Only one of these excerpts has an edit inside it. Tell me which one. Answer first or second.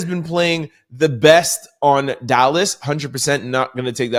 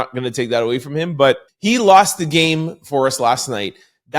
second